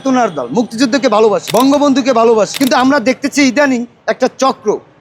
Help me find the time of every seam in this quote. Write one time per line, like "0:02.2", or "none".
0:01.4
0:02.5